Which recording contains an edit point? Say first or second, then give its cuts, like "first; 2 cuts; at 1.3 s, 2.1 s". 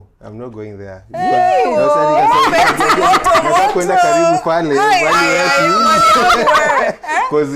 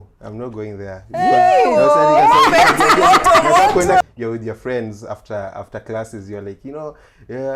second; 1 cut; at 4.0 s